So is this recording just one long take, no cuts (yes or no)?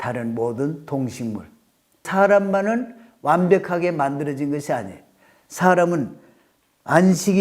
no